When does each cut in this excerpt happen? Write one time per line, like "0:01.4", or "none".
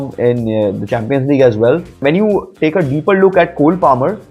0:02.0